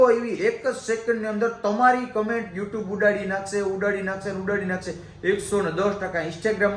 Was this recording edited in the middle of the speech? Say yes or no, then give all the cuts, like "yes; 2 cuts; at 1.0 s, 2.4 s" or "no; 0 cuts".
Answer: no; 0 cuts